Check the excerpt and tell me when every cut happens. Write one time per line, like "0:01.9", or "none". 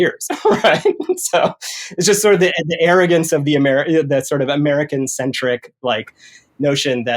none